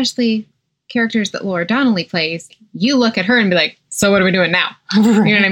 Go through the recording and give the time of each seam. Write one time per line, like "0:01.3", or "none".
0:02.6